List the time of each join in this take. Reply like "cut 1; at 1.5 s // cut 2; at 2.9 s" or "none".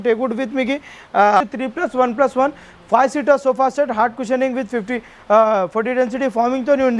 cut 1; at 1.4 s